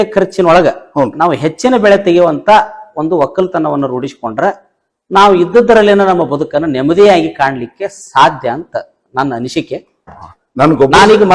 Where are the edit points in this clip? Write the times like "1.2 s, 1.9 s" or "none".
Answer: 10.1 s